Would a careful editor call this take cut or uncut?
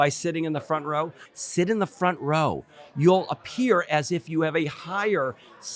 cut